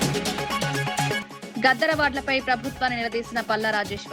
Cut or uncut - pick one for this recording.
cut